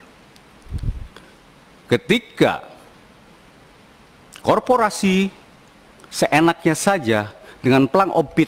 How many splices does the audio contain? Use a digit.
0